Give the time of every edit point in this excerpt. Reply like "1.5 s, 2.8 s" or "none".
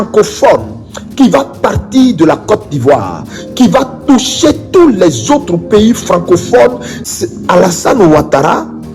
6.9 s

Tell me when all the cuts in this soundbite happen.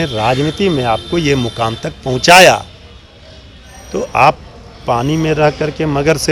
none

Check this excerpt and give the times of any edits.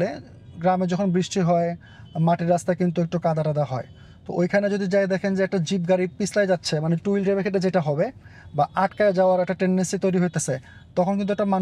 none

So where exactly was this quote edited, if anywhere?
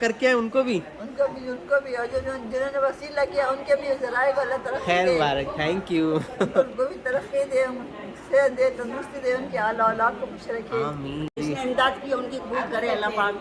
11.4 s

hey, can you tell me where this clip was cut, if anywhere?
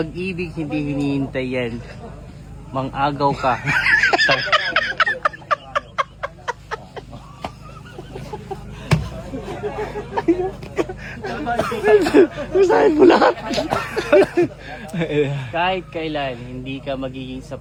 none

